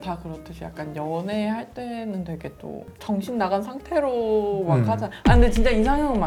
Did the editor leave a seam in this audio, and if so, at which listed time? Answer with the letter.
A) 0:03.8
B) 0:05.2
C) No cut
C